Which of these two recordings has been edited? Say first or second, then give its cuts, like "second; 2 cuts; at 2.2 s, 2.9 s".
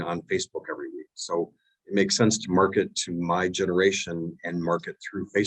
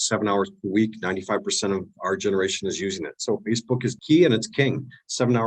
second; 1 cut; at 4.0 s